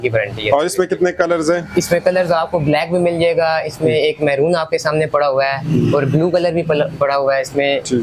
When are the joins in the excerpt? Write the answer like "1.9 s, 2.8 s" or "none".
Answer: none